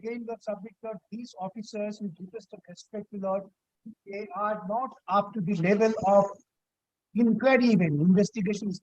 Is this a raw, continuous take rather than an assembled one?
yes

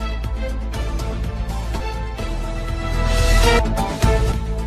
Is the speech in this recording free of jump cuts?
no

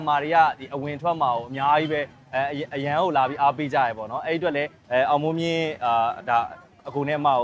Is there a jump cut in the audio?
no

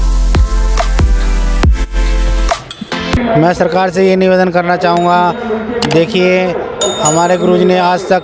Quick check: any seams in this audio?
yes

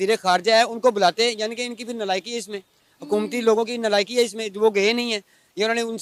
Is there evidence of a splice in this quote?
no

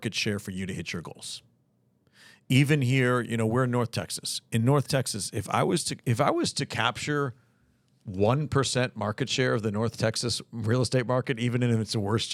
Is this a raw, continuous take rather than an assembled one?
yes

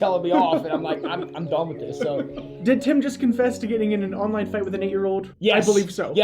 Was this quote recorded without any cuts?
no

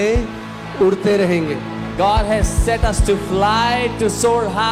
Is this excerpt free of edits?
yes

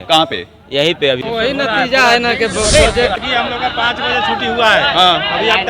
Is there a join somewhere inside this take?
yes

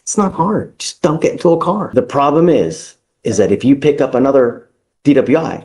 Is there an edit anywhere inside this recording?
yes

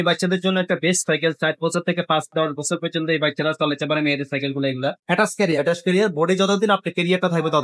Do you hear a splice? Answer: yes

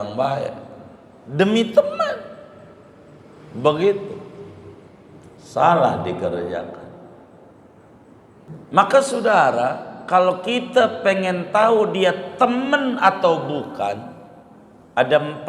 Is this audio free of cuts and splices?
no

